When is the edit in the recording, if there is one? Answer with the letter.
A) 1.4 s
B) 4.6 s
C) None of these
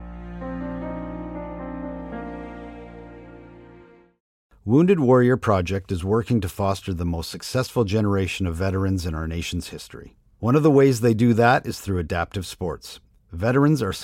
B